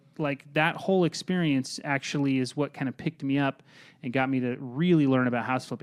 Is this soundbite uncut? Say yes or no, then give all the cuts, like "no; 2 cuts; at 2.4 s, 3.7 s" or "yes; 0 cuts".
yes; 0 cuts